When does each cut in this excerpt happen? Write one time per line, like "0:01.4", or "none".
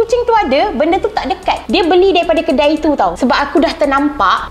0:01.6